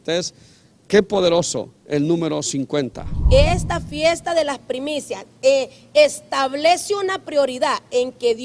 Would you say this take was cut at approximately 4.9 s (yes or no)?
no